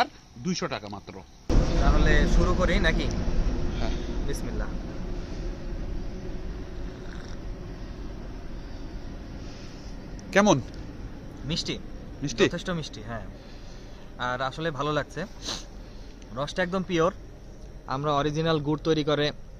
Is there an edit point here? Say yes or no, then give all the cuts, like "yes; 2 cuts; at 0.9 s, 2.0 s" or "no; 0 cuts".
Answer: yes; 1 cut; at 1.5 s